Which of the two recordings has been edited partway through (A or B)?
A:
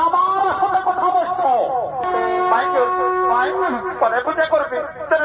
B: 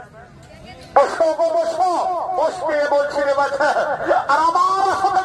A